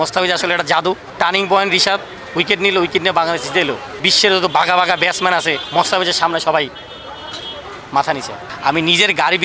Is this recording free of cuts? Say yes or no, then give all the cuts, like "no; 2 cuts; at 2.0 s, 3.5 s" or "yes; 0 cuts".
no; 4 cuts; at 1.1 s, 4.1 s, 5.6 s, 8.4 s